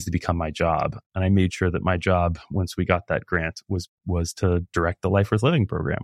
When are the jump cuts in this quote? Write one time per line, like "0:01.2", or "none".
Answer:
0:01.0